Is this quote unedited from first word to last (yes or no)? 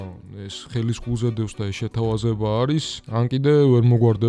no